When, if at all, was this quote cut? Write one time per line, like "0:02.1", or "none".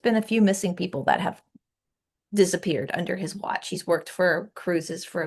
none